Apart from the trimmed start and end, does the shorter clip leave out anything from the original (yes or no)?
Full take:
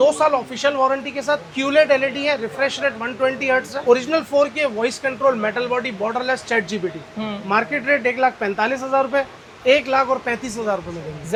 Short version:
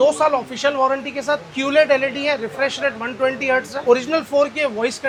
no